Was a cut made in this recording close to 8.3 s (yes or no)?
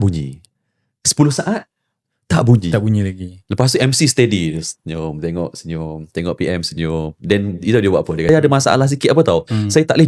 yes